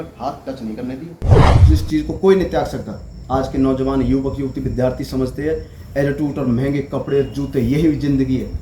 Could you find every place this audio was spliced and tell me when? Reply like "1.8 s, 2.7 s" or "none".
1.6 s